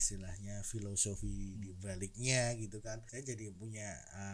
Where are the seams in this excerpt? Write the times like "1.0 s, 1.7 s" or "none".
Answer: 3.1 s